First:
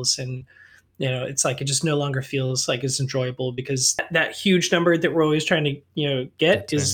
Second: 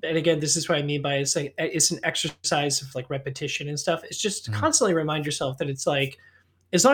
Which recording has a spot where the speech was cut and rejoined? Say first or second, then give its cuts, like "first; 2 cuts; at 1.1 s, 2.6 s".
first; 1 cut; at 4.1 s